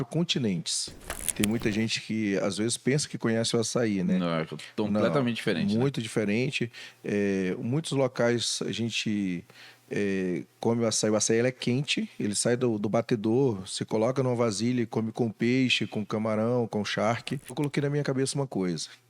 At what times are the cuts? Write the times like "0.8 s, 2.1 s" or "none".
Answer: 1.3 s, 17.5 s

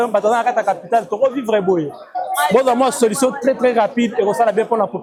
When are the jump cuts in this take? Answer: none

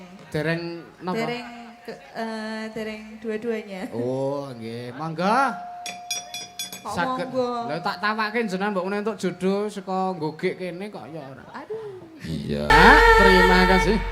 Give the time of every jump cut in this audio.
12.7 s

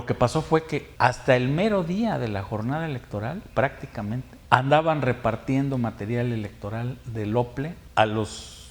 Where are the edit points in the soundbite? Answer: 0.9 s, 4.3 s, 7.8 s

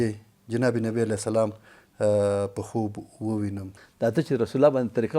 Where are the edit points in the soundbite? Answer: 3.7 s

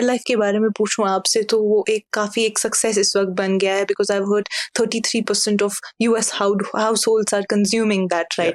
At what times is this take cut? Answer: none

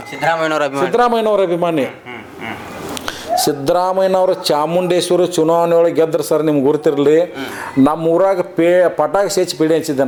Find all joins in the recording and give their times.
none

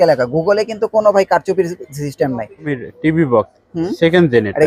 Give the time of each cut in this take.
2.8 s

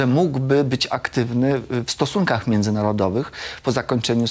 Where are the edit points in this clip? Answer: none

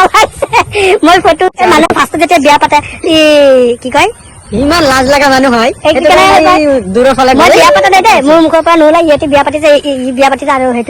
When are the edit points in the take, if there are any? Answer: 1.6 s

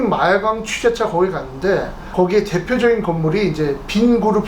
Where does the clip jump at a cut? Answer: 2.0 s

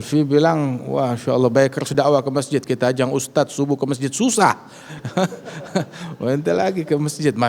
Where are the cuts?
none

